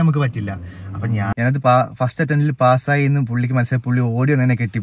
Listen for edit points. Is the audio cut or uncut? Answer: cut